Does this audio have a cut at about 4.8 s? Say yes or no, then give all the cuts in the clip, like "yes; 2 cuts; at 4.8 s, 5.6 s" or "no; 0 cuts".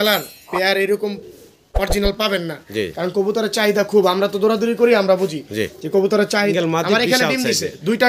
no; 1 cut; at 6.5 s